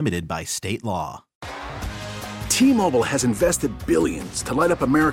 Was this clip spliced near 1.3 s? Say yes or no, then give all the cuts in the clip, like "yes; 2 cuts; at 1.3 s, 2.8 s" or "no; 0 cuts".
yes; 1 cut; at 1.3 s